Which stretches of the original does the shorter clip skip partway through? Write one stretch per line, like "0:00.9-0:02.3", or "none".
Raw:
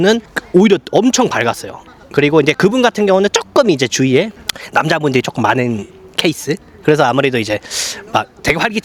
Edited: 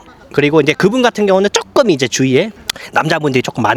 none